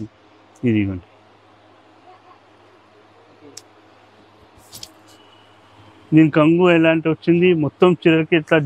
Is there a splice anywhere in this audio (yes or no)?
no